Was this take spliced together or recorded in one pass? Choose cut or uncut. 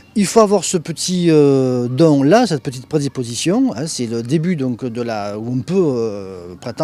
uncut